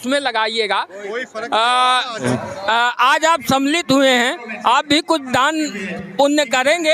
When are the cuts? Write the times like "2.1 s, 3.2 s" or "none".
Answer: 2.2 s

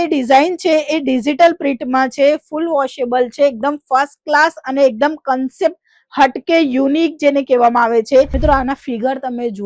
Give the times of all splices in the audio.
8.3 s

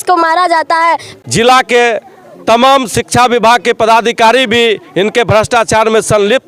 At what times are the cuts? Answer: 1.1 s

